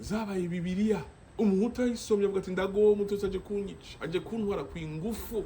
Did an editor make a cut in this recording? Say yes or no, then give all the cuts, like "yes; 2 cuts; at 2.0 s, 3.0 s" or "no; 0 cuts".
yes; 1 cut; at 1.2 s